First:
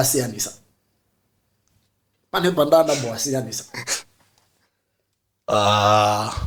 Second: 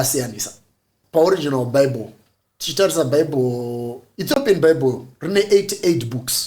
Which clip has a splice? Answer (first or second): second